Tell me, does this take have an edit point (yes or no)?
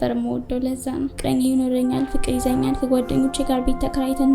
yes